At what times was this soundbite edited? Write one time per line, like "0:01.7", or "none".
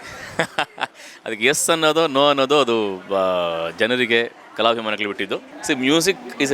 0:05.5